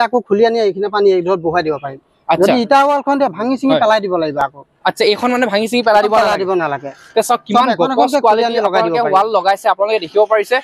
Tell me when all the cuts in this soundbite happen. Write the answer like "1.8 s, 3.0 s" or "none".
none